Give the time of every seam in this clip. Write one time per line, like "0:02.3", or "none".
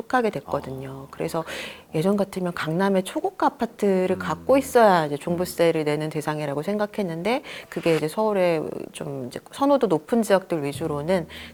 none